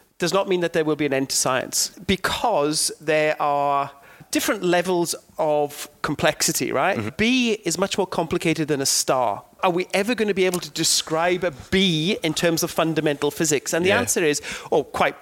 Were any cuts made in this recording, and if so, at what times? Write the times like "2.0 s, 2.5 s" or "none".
1.9 s, 4.2 s, 7.1 s, 9.6 s